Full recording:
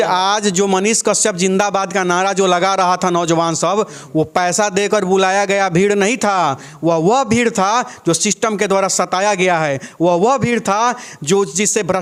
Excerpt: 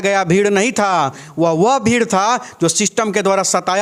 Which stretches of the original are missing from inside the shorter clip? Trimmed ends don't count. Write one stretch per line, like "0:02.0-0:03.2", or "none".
none